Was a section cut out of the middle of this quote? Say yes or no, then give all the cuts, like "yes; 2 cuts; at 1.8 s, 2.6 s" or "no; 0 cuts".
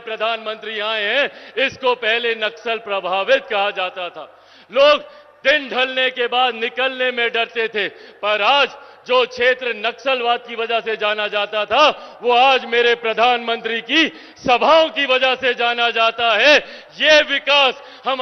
no; 0 cuts